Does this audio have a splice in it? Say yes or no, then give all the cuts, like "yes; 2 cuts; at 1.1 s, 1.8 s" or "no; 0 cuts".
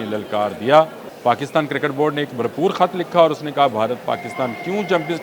yes; 1 cut; at 1.0 s